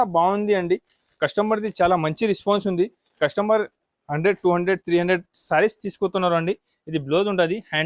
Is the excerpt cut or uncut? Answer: uncut